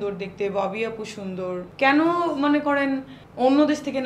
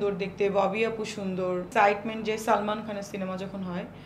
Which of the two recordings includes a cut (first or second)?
second